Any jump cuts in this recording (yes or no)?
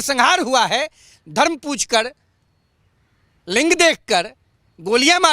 no